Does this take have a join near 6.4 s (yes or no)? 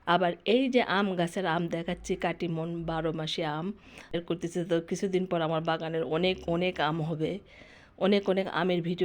no